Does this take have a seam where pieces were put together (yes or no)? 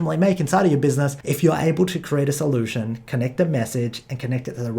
yes